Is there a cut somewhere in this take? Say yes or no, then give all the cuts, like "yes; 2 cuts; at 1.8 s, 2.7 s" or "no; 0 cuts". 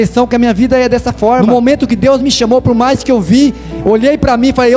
yes; 1 cut; at 1.4 s